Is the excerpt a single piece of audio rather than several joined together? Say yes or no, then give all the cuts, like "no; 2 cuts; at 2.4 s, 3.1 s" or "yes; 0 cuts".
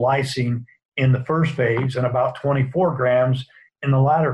yes; 0 cuts